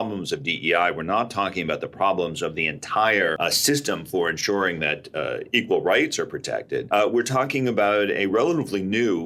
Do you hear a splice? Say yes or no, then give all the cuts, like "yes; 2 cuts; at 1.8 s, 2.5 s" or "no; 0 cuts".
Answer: yes; 2 cuts; at 3.4 s, 6.8 s